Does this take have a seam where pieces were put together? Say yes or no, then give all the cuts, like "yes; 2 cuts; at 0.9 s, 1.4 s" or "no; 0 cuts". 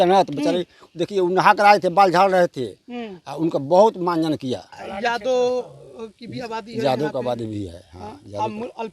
yes; 1 cut; at 4.8 s